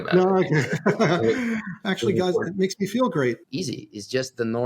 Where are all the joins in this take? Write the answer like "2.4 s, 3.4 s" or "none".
1.8 s, 3.4 s